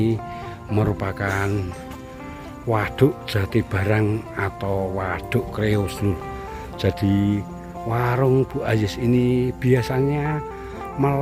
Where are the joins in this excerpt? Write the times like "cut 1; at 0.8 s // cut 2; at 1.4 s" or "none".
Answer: none